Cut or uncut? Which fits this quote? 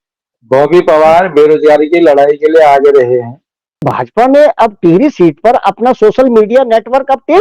cut